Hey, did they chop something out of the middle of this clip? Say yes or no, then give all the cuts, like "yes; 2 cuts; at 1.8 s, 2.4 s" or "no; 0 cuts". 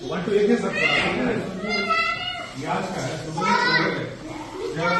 no; 0 cuts